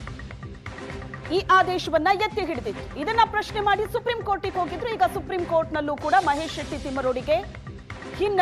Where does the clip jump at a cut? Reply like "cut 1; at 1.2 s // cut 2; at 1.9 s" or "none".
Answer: cut 1; at 1.3 s